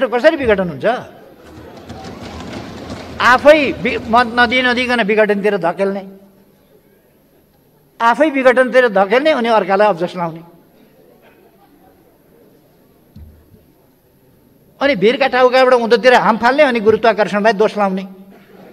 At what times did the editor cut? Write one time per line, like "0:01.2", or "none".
none